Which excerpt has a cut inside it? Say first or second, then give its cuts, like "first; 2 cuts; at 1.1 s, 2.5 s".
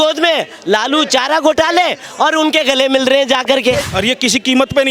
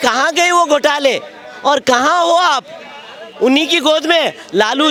first; 1 cut; at 3.9 s